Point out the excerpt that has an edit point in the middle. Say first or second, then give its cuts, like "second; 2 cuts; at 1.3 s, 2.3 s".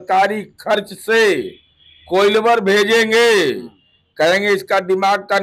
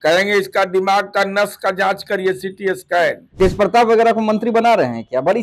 second; 1 cut; at 3.2 s